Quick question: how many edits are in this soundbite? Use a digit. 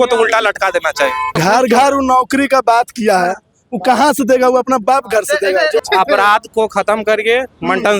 2